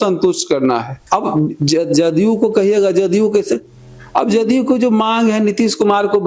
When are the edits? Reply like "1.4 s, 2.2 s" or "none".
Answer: 0.9 s

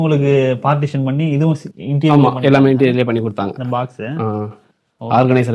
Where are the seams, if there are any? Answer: none

